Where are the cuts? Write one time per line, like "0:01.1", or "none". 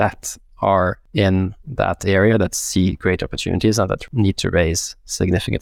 0:01.0
0:04.0

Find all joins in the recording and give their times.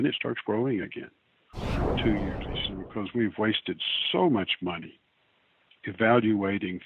0:02.5

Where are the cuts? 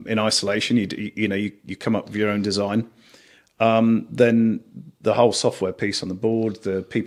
none

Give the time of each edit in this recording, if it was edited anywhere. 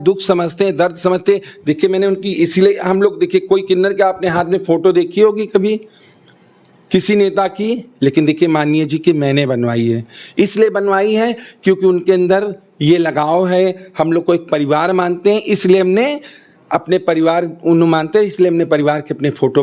none

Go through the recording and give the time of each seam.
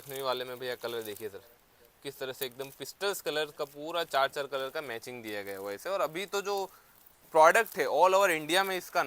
0:05.8

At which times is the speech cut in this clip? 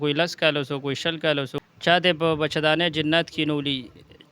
0:01.5

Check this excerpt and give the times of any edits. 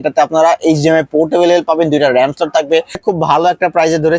0:03.0

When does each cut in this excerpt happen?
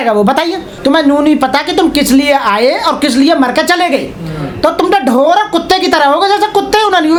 none

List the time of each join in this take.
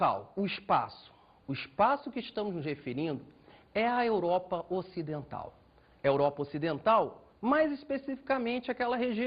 none

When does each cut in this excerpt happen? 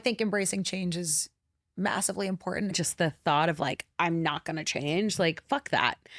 0:02.8

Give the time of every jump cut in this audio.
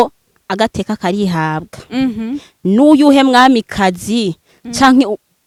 none

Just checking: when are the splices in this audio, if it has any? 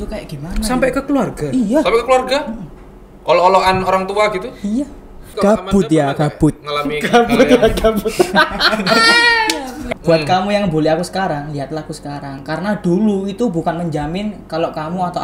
0:05.3
0:09.8
0:12.4

